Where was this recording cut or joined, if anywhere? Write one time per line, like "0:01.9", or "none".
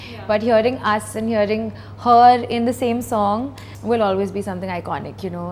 0:03.7